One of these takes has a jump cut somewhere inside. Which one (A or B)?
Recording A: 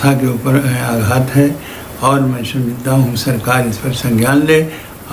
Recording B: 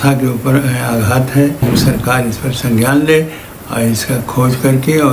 B